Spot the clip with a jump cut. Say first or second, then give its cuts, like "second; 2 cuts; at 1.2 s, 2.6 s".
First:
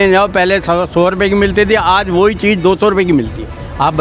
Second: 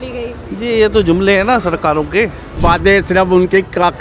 second; 1 cut; at 2.6 s